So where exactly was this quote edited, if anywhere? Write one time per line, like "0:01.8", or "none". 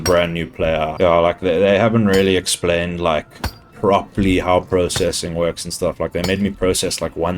0:00.9
0:03.6